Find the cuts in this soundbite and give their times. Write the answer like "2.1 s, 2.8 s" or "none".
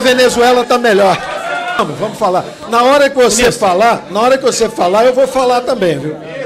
1.8 s